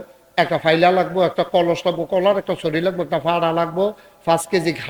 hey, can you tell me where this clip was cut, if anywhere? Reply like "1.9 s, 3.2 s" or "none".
none